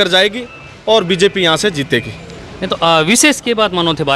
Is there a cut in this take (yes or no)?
no